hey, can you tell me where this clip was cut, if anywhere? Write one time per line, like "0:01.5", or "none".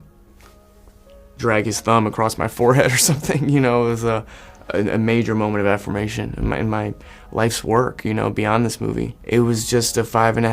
0:09.2